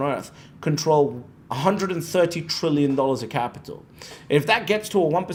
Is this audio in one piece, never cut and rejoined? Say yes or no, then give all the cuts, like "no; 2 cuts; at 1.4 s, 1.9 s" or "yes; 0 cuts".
yes; 0 cuts